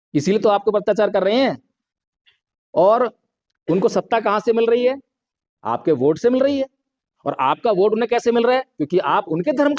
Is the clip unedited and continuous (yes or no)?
yes